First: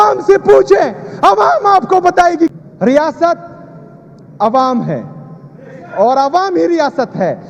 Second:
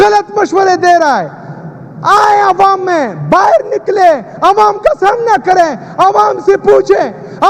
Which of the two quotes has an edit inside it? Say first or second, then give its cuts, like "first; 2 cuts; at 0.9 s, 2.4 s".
first; 1 cut; at 2.5 s